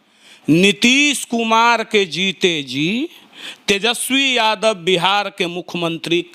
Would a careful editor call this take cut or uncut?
uncut